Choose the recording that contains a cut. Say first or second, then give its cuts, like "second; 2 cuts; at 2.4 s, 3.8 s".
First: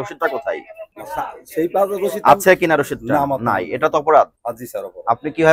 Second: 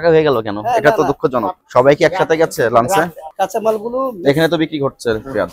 second; 2 cuts; at 1.6 s, 3.2 s